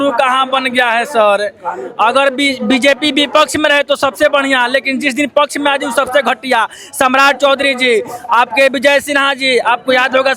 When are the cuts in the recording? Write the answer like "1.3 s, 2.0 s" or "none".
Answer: none